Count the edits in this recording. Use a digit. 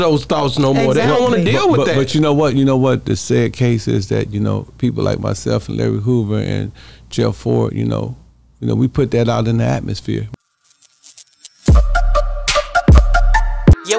1